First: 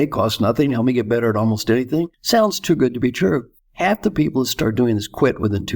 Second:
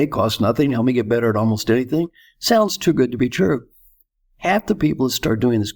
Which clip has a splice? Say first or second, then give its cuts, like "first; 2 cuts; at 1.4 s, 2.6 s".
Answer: first; 2 cuts; at 2.2 s, 3.6 s